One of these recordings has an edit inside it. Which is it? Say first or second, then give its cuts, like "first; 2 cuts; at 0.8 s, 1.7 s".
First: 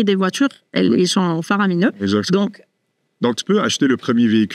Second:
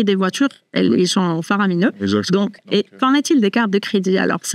second; 1 cut; at 2.6 s